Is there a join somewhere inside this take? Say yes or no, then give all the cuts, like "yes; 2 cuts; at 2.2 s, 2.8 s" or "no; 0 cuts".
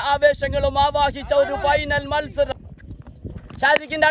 yes; 1 cut; at 2.5 s